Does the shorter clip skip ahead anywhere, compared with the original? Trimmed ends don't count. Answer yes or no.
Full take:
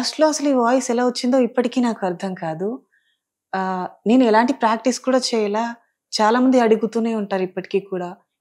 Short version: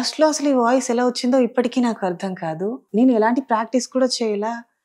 yes